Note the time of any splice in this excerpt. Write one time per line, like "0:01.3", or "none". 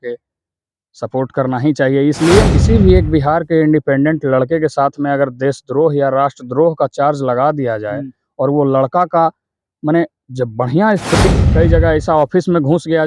0:02.5
0:11.3